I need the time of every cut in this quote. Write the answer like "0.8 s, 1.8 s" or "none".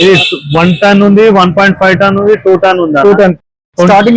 none